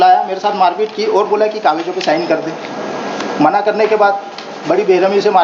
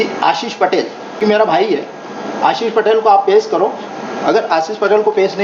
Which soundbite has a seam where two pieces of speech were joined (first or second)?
second